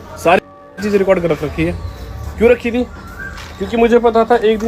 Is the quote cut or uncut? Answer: uncut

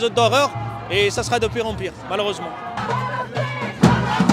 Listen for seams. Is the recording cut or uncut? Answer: uncut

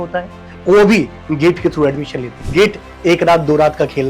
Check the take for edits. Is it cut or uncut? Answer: cut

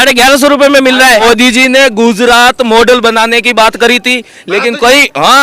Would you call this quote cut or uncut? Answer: cut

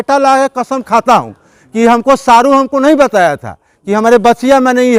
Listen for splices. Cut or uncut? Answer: uncut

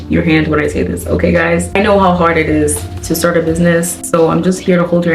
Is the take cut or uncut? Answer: cut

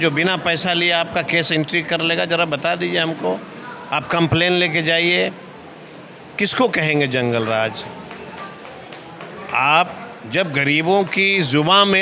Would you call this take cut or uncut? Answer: uncut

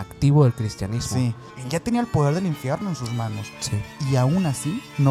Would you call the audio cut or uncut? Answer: cut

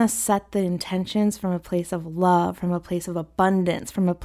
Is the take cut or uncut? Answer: uncut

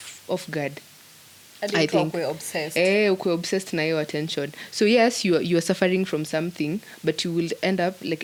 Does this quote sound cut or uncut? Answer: uncut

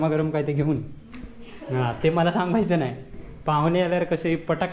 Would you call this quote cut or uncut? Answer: uncut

